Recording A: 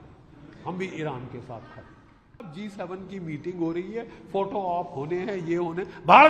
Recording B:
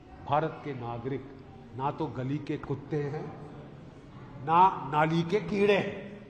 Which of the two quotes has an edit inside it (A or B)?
A